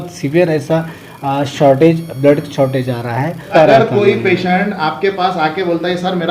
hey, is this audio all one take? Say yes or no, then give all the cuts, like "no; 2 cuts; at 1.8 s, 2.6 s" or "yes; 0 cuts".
no; 1 cut; at 3.5 s